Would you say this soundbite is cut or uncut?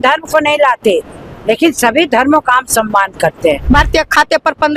cut